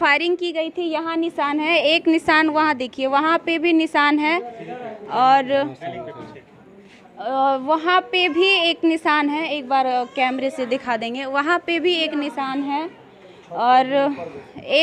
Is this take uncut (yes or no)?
yes